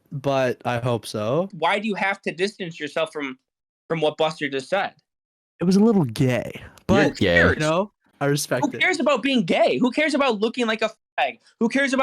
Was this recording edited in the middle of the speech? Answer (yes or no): yes